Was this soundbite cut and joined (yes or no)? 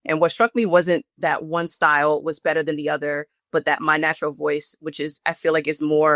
yes